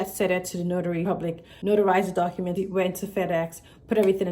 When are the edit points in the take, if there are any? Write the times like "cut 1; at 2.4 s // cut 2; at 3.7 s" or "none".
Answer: cut 1; at 1.2 s // cut 2; at 2.6 s